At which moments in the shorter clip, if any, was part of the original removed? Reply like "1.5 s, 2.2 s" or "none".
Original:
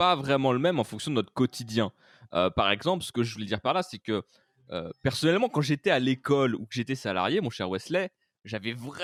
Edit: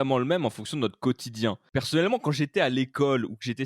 1.6 s